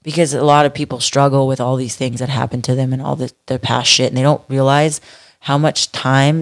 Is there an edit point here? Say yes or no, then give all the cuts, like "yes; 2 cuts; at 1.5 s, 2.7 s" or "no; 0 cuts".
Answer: no; 0 cuts